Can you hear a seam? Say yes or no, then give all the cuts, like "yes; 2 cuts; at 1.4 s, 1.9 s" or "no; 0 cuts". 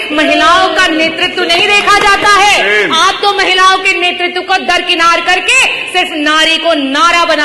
no; 0 cuts